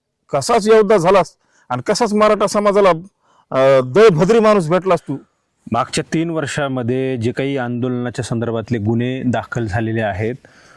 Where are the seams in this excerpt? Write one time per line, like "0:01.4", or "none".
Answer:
none